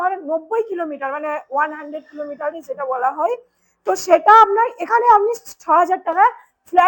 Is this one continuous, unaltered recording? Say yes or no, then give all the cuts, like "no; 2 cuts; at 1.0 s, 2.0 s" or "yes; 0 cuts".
yes; 0 cuts